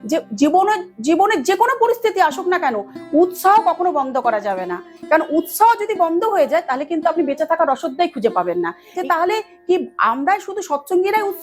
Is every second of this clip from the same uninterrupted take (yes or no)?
no